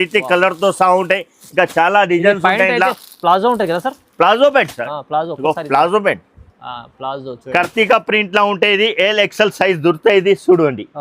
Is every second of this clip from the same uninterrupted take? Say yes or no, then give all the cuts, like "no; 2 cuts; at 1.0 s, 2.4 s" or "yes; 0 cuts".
no; 1 cut; at 7.4 s